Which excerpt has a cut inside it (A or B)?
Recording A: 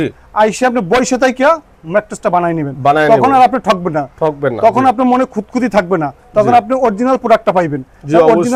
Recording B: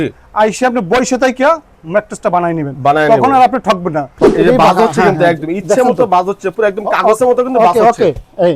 B